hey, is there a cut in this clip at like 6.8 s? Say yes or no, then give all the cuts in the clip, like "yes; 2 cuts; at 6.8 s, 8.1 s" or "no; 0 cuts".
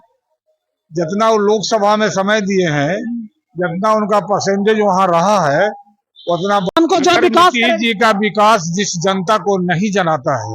yes; 1 cut; at 6.8 s